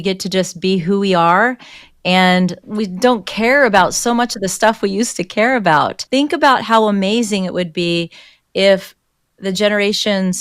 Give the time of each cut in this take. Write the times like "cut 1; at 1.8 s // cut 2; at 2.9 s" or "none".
cut 1; at 2.6 s // cut 2; at 6.0 s